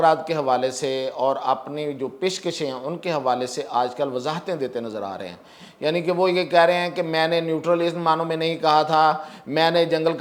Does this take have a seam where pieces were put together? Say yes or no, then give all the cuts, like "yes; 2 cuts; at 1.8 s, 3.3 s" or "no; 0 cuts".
no; 0 cuts